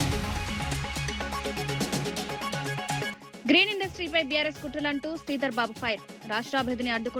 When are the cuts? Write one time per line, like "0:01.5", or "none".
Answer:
0:01.4
0:03.2